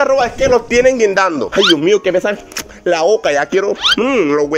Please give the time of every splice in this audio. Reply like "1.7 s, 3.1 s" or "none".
1.5 s